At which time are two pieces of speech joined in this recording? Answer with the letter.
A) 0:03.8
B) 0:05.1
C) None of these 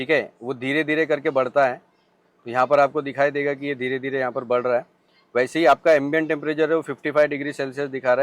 C